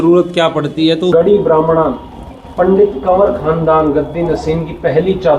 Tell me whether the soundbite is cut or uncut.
cut